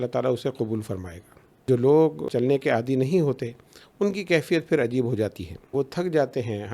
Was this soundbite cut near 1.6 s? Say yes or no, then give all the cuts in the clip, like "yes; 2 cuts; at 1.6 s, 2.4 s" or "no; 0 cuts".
yes; 3 cuts; at 1.6 s, 2.3 s, 5.7 s